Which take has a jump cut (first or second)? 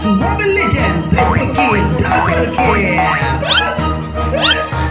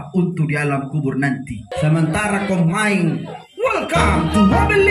second